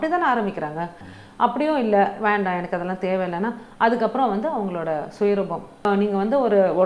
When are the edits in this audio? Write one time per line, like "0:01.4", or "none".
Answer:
0:01.1
0:05.8